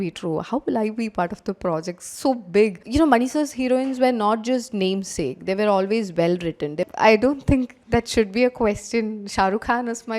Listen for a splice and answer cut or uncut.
cut